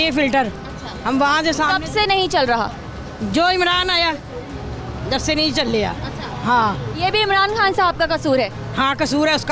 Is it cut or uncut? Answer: uncut